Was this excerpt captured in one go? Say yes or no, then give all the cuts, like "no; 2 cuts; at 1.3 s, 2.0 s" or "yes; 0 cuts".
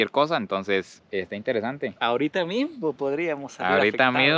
yes; 0 cuts